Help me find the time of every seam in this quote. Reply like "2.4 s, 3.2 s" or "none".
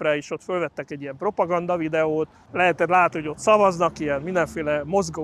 2.4 s